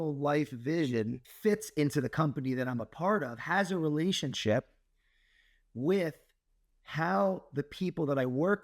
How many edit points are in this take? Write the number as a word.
one